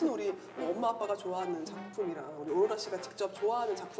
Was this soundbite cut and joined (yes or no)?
no